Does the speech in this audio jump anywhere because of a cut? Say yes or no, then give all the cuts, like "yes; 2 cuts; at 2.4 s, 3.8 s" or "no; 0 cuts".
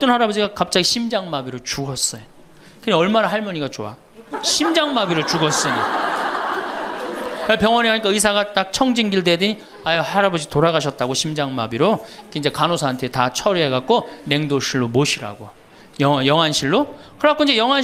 no; 0 cuts